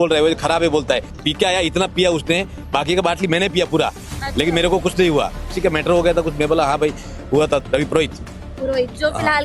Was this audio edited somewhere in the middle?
yes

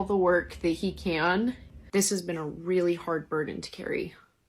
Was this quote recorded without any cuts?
no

